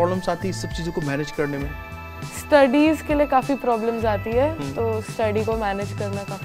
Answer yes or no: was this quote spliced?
no